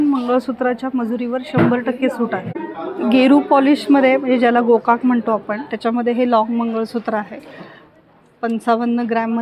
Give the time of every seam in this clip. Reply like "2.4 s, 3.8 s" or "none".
2.5 s

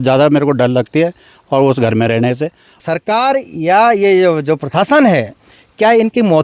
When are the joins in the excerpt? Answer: 2.8 s

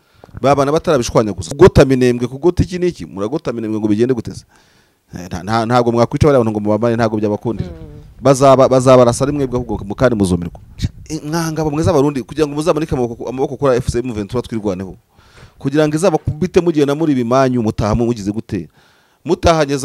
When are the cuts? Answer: 1.4 s, 10.6 s

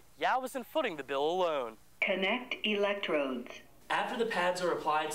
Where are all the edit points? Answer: 1.9 s

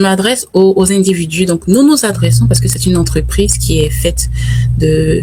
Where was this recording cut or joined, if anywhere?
none

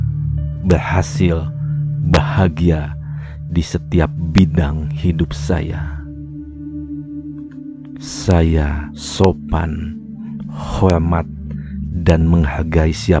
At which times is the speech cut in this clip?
5.7 s, 8.3 s

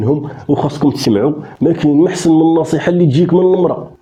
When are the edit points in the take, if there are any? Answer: none

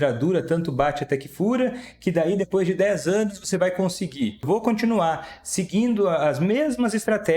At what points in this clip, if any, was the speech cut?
4.4 s

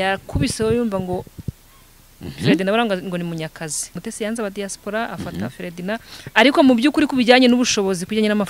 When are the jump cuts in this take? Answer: 4.0 s

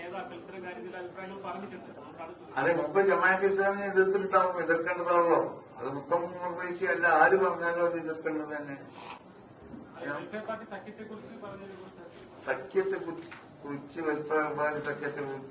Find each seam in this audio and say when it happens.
none

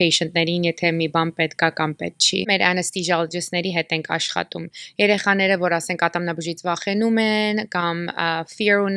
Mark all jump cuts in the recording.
none

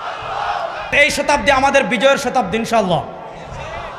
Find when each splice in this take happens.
0.9 s

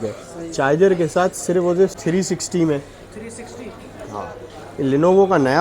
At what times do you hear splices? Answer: 2.0 s

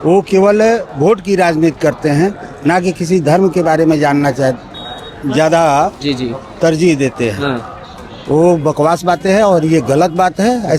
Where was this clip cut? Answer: none

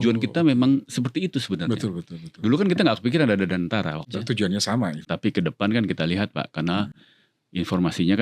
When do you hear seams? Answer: 4.1 s, 5.0 s

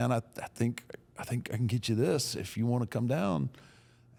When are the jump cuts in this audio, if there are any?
none

